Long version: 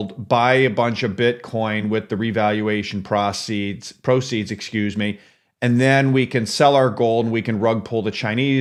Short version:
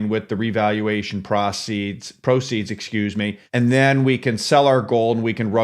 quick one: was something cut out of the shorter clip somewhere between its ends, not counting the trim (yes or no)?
yes